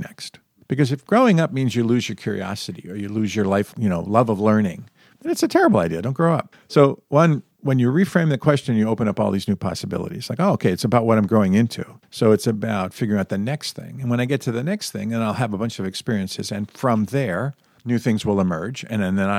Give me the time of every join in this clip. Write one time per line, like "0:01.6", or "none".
0:03.7
0:06.6
0:07.5